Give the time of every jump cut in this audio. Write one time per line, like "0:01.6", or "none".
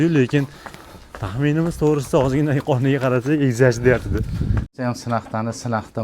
0:04.7